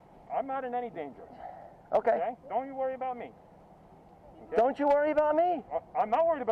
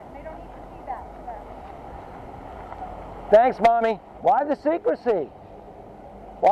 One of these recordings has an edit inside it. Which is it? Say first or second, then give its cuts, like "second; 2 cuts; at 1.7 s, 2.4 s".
second; 1 cut; at 4.1 s